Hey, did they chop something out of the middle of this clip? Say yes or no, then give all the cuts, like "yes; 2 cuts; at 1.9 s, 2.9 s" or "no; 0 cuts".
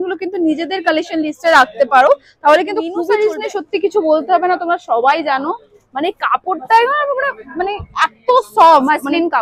yes; 1 cut; at 3.1 s